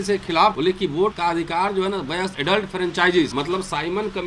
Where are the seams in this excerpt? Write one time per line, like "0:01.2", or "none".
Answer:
0:01.0
0:02.3
0:03.3